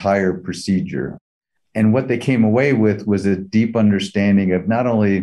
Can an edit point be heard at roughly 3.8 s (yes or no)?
no